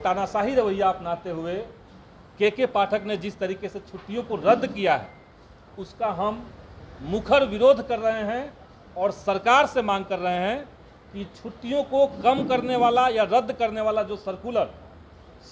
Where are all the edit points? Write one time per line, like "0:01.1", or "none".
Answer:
none